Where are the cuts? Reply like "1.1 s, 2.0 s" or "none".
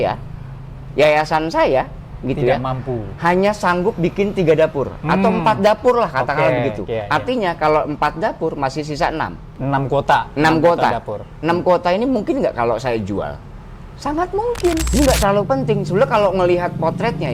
14.9 s

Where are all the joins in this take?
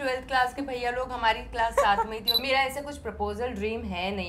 2.4 s

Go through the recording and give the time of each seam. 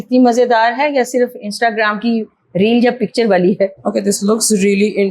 3.7 s

